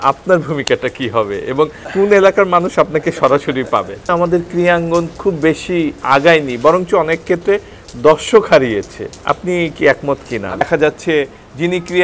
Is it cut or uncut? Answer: cut